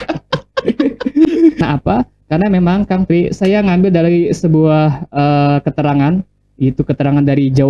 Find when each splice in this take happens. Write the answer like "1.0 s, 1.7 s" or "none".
1.6 s